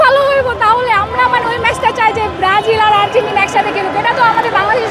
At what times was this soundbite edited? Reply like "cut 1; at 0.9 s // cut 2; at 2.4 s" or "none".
none